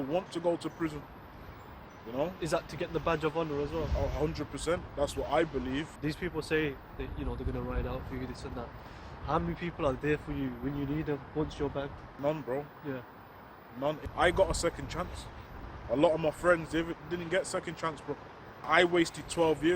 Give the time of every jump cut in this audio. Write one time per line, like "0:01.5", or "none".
0:06.0
0:12.0
0:14.0
0:18.7